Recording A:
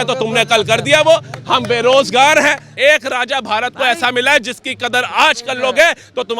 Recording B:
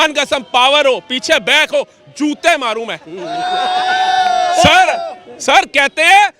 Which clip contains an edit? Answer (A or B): A